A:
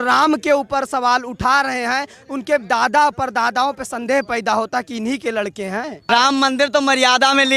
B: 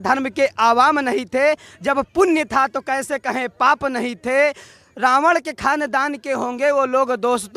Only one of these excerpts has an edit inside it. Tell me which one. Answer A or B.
A